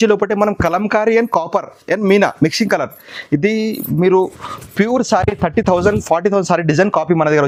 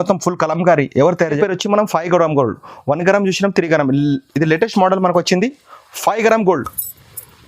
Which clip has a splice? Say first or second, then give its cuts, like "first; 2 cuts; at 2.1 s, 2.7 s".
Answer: second; 1 cut; at 1.3 s